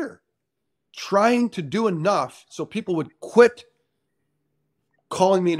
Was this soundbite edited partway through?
no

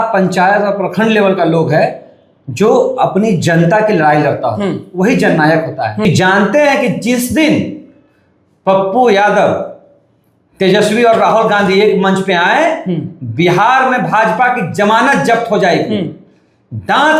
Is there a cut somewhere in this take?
yes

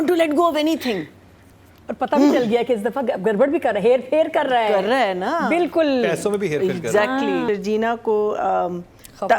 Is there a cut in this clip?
yes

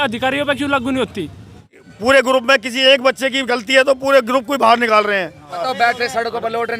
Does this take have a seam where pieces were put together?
yes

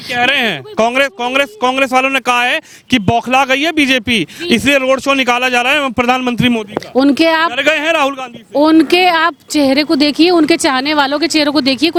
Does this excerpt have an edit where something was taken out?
no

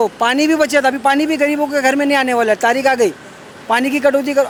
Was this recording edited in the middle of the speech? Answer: no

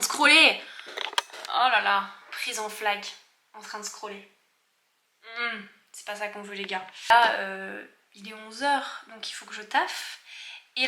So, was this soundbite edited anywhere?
no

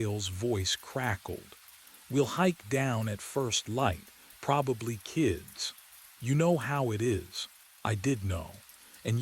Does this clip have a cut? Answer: no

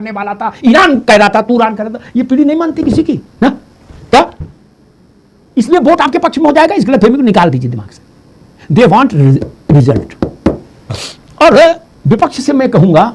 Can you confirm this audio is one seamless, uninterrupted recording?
yes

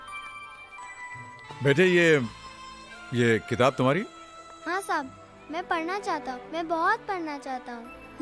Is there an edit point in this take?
no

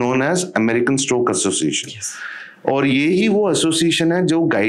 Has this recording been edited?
no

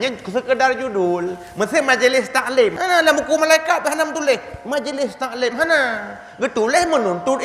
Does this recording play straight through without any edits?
no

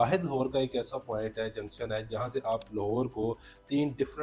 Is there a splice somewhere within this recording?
no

